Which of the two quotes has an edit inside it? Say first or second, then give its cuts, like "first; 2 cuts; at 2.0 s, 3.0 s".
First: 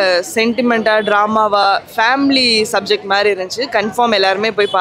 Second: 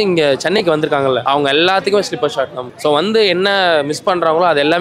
second; 2 cuts; at 1.2 s, 2.6 s